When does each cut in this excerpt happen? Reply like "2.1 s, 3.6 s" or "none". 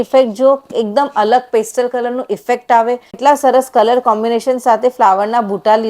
3.2 s